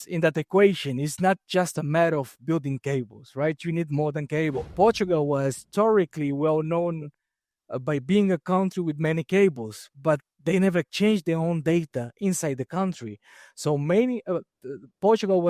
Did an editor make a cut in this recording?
yes; 1 cut; at 4.6 s

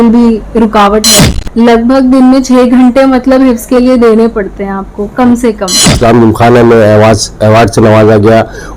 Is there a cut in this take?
yes; 2 cuts; at 1.1 s, 5.9 s

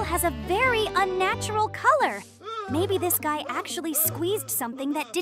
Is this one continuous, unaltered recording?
yes; 0 cuts

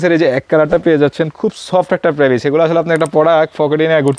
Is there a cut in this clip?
no; 0 cuts

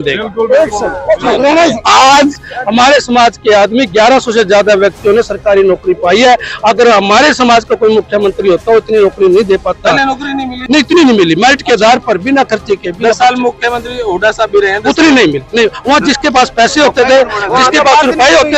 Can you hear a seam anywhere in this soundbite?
yes; 1 cut; at 2.4 s

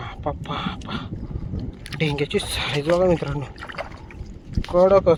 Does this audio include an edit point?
no; 0 cuts

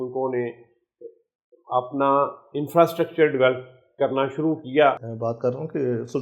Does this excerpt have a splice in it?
yes; 1 cut; at 5.1 s

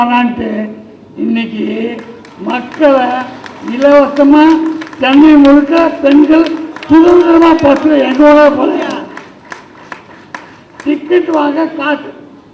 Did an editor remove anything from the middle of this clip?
no; 0 cuts

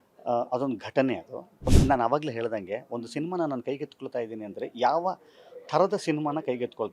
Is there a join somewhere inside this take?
yes; 1 cut; at 1.7 s

